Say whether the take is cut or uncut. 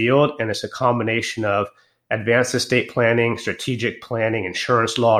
uncut